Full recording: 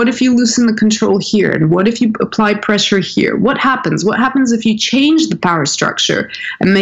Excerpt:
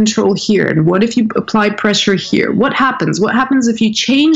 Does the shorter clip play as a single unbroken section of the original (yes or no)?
yes